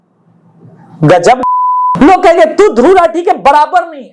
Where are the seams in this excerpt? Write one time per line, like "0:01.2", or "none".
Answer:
0:01.9